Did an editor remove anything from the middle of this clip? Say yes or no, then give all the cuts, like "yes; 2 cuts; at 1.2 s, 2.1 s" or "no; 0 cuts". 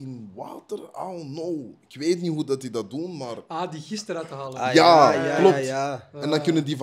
no; 0 cuts